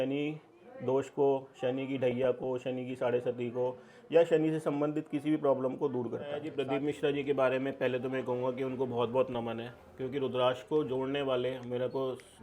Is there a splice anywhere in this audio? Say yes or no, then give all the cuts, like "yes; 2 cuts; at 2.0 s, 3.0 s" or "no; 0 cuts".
yes; 1 cut; at 6.5 s